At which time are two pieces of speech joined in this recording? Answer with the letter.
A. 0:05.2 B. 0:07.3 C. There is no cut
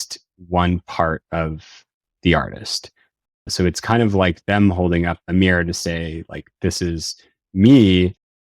A